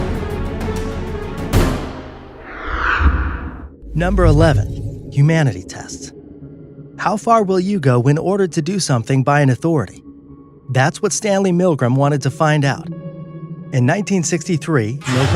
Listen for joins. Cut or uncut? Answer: cut